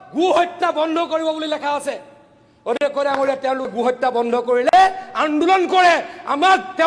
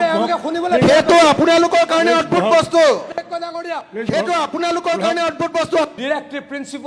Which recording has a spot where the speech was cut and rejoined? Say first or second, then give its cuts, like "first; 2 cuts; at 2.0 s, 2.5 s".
second; 1 cut; at 6.0 s